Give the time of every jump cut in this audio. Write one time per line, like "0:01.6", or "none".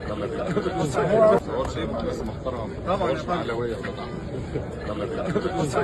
0:01.4

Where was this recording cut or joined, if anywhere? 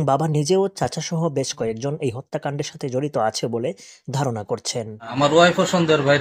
0:05.1

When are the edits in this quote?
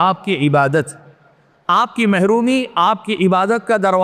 none

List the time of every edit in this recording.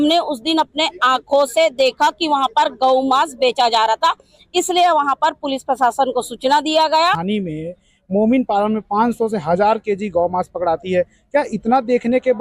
0:07.2

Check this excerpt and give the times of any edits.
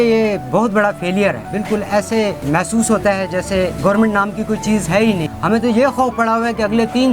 0:01.5
0:02.4
0:03.8
0:05.3

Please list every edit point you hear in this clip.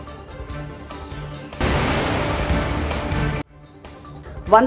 0:01.6

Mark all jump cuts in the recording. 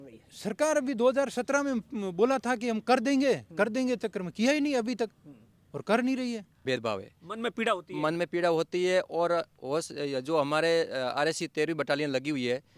0:06.8

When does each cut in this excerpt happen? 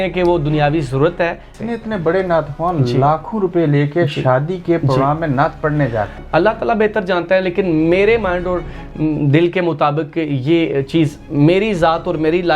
0:01.5
0:06.2

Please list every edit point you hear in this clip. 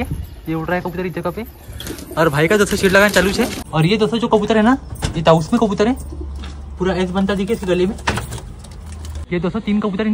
0:03.6
0:09.2

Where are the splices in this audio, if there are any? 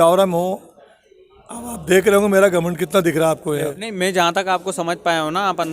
0:03.8

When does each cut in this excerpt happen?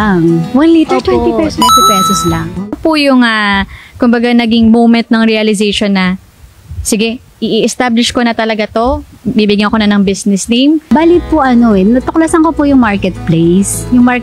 0:02.7

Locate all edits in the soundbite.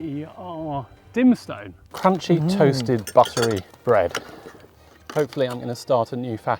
0:01.9
0:03.7

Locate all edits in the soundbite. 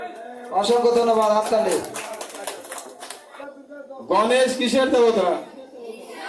0:03.3

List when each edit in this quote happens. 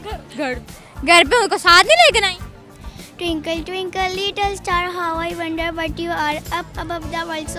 0:02.5

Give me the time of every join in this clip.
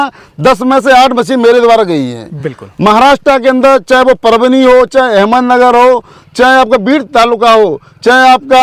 none

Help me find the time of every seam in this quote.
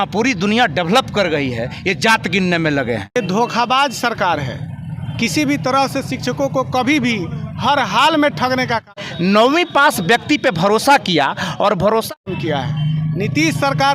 0:03.2
0:09.0
0:12.1

